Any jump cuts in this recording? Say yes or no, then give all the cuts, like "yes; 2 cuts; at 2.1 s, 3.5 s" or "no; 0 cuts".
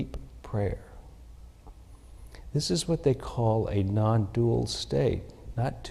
no; 0 cuts